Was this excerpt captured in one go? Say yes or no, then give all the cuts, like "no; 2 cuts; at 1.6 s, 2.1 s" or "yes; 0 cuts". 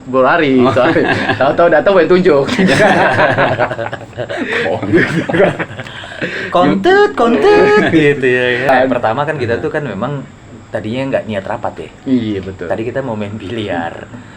no; 1 cut; at 8.7 s